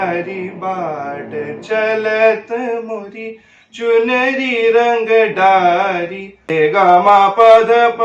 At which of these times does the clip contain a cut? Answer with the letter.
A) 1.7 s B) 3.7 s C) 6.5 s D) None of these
C